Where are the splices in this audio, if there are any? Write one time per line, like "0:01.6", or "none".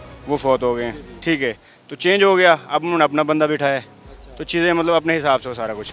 none